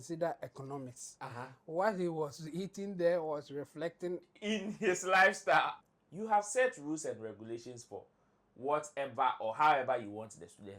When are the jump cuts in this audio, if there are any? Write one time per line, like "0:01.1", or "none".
0:05.8